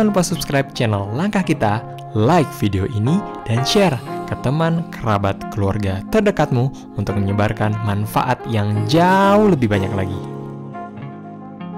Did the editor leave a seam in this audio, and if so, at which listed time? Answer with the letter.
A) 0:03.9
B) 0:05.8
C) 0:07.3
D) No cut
D